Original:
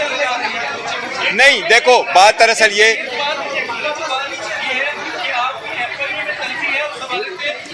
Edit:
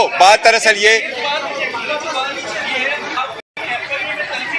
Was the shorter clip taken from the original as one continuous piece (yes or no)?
no